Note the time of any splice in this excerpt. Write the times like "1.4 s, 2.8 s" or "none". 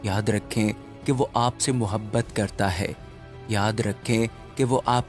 none